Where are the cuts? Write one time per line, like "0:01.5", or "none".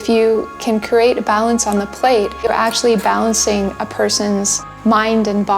0:02.5
0:04.6